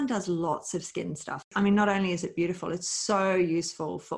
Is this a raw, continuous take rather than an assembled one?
no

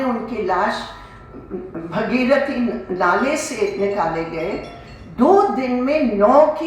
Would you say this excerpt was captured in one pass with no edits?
yes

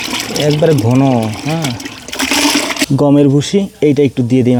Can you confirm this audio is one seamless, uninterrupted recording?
yes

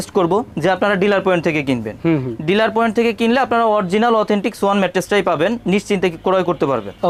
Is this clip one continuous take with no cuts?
yes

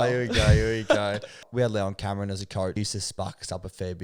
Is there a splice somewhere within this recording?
yes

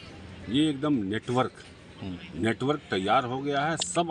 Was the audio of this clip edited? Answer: no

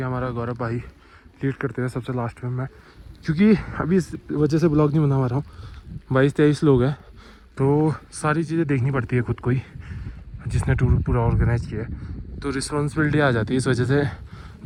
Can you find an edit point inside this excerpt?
no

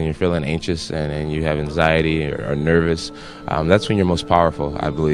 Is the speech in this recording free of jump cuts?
yes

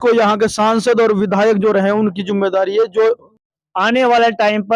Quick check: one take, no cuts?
no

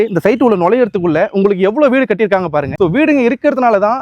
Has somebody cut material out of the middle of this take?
yes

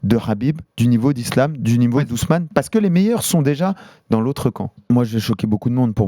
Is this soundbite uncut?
no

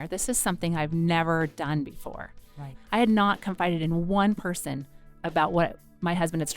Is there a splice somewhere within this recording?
yes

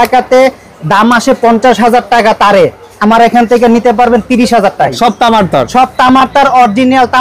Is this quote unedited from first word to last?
no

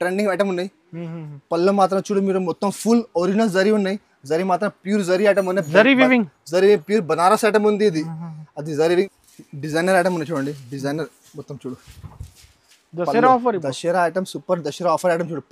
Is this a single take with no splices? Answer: no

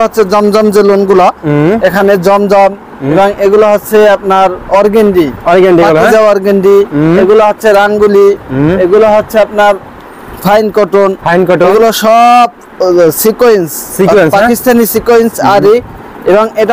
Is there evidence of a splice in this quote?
no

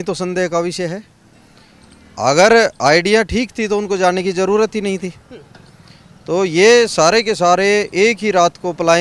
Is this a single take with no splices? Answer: yes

